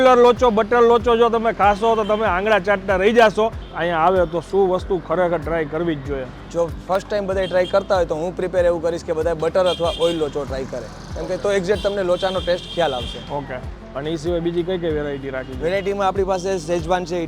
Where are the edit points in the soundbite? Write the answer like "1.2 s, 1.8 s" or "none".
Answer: 3.6 s

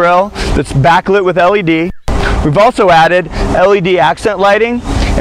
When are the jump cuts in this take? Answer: 3.4 s

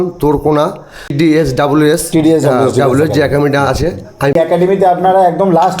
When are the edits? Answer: 1.1 s, 4.4 s

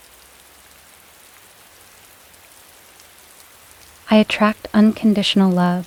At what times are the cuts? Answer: none

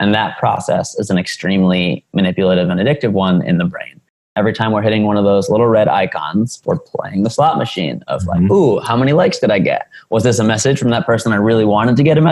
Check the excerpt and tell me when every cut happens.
4.2 s

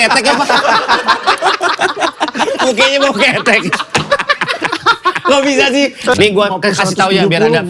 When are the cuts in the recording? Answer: 6.1 s

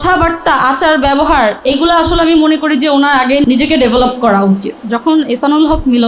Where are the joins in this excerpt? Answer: 1.6 s, 3.4 s, 4.8 s

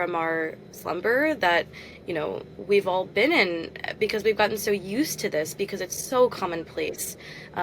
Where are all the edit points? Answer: none

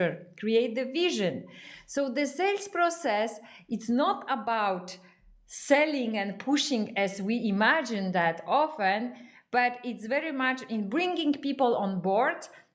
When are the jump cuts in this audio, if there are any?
none

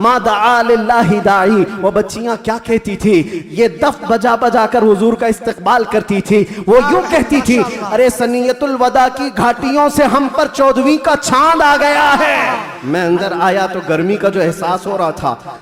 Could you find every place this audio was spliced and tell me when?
12.7 s

